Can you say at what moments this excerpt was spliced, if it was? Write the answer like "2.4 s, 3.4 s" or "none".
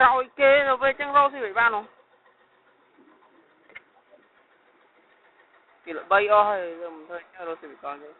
4.9 s